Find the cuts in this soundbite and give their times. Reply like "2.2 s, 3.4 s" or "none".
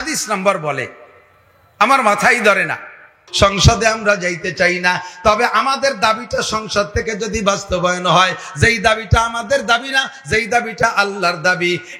3.2 s